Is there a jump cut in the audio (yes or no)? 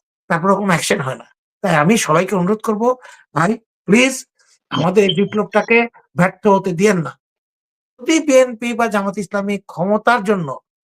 yes